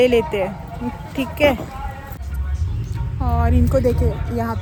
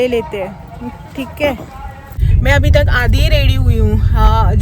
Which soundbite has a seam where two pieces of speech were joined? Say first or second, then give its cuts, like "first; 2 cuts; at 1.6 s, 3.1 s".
second; 1 cut; at 2.3 s